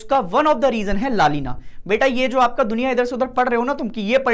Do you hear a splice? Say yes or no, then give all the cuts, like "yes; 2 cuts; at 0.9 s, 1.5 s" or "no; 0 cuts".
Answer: no; 0 cuts